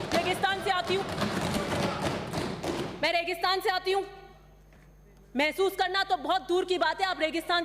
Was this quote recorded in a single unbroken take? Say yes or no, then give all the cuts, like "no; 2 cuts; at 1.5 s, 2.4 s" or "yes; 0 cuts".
yes; 0 cuts